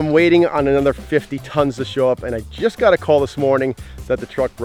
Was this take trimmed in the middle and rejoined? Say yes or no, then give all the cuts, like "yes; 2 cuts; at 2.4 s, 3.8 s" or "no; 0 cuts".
no; 0 cuts